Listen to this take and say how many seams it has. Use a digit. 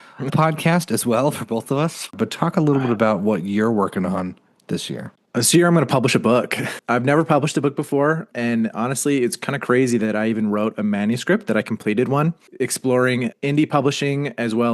4